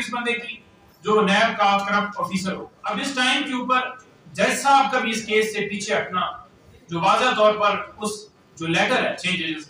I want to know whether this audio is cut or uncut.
cut